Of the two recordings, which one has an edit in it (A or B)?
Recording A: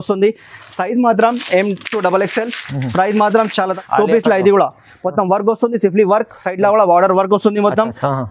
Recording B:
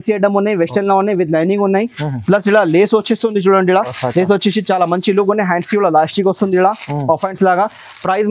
A